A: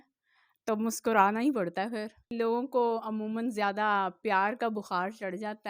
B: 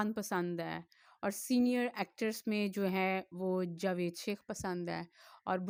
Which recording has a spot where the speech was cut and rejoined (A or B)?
A